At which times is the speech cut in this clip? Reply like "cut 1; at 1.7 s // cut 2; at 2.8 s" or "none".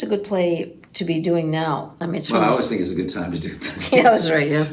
cut 1; at 1.9 s